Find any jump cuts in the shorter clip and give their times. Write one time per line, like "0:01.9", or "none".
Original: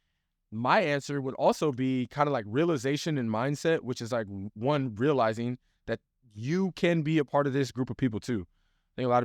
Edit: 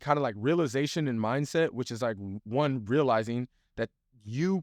none